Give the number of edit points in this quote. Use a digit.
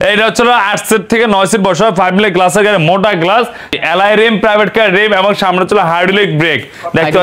1